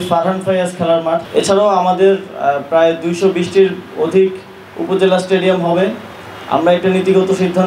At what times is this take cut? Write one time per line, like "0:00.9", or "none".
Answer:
0:01.2